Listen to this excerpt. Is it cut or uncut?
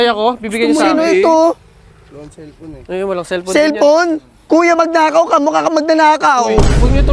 uncut